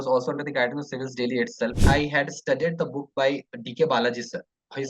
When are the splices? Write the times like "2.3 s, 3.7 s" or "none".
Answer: 1.8 s